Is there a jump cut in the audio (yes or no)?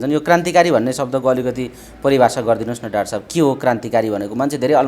no